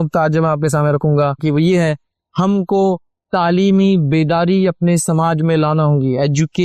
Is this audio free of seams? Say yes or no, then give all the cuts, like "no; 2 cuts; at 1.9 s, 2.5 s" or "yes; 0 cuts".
no; 1 cut; at 1.4 s